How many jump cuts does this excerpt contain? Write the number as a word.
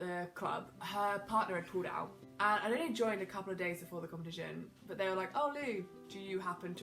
one